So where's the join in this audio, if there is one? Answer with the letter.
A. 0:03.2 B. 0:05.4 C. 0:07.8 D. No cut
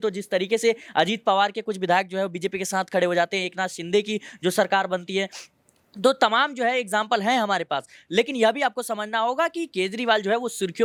D